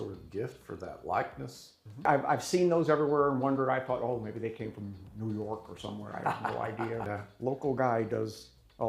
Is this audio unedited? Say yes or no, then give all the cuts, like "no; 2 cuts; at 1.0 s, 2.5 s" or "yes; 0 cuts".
no; 2 cuts; at 2.1 s, 7.1 s